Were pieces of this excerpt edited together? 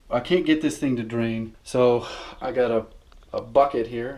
yes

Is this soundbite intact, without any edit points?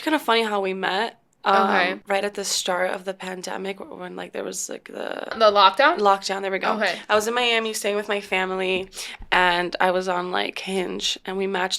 no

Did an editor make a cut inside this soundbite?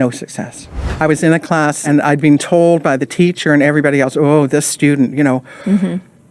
yes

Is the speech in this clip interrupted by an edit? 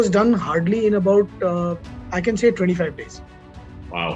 no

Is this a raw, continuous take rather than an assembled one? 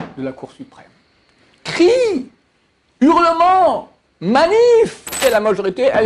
no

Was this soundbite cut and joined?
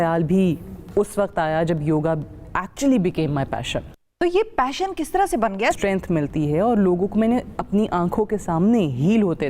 yes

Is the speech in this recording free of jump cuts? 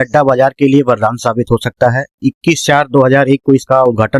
yes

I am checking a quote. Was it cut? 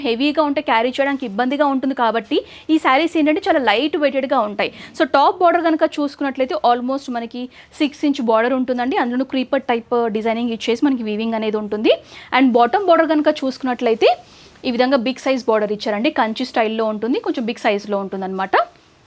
no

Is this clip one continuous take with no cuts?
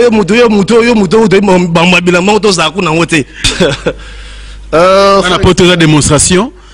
no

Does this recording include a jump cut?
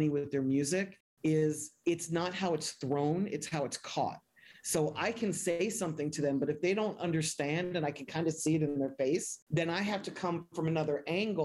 yes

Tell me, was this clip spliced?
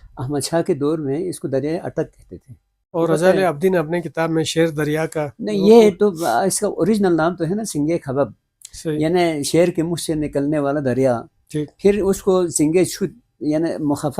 yes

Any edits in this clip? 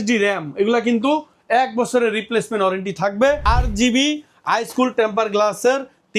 yes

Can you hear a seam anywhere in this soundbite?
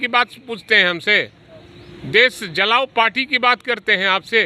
no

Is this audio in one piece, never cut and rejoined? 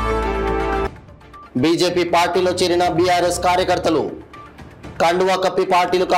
yes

